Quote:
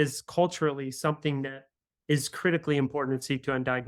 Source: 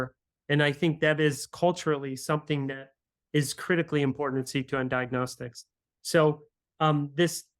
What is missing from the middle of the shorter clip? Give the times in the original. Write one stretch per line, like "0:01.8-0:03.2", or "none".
none